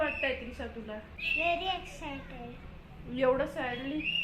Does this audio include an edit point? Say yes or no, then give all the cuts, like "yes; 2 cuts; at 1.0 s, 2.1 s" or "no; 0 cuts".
yes; 1 cut; at 1.2 s